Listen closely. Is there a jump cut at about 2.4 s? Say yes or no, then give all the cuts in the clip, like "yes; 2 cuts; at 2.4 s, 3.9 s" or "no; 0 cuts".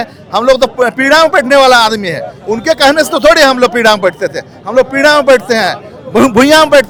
no; 0 cuts